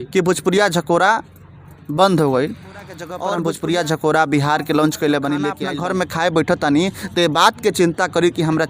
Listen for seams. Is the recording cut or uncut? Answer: cut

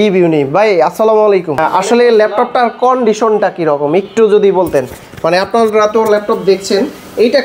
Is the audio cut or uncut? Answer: uncut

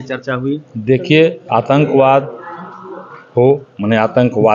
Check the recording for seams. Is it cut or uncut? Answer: uncut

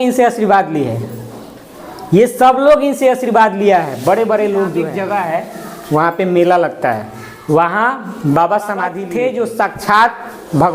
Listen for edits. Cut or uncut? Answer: cut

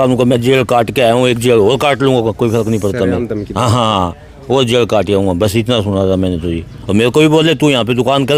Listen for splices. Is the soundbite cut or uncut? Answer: uncut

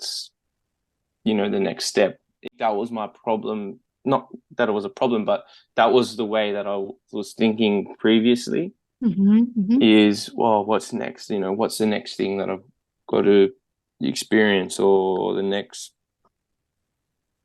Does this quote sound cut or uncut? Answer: cut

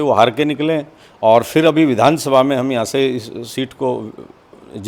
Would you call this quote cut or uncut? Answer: uncut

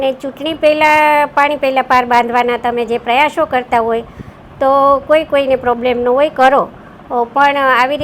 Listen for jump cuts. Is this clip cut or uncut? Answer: uncut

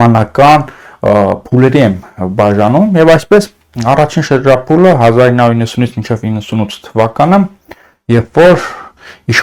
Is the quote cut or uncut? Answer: uncut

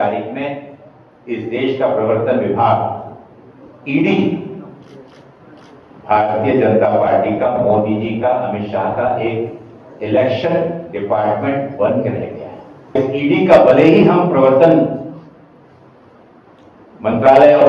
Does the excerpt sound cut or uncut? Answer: cut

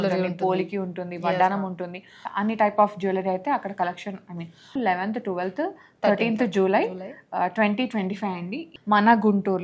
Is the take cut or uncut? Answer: cut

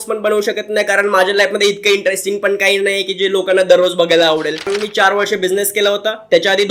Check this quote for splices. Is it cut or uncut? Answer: cut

